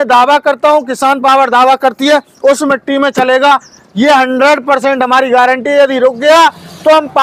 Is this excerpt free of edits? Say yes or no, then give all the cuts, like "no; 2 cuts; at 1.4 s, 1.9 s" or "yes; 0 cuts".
yes; 0 cuts